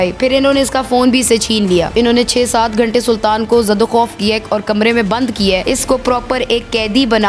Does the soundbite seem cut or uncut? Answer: cut